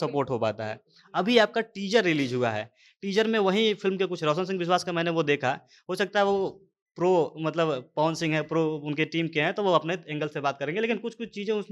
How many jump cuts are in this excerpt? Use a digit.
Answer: 0